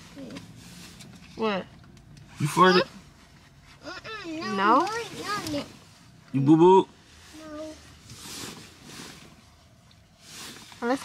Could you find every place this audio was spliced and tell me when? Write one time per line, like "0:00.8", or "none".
none